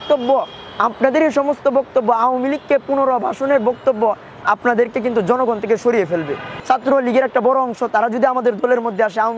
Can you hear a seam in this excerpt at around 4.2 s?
no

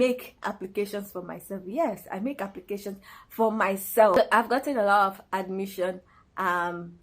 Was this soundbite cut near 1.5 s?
no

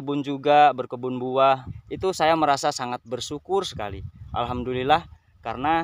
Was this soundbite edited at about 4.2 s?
no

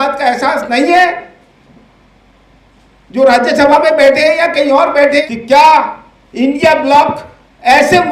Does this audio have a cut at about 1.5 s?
no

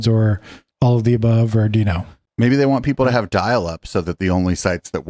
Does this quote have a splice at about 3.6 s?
no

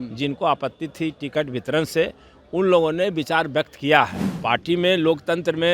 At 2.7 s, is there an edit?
no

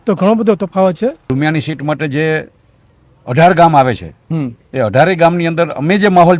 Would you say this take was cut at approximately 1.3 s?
yes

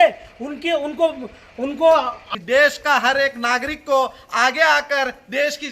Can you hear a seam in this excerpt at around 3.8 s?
no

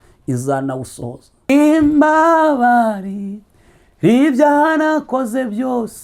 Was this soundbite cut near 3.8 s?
no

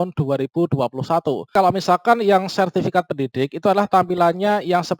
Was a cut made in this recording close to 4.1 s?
no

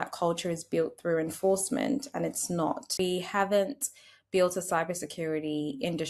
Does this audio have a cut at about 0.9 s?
no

